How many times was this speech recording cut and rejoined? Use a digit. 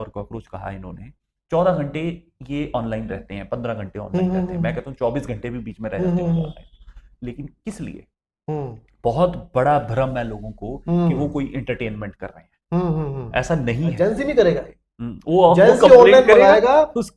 1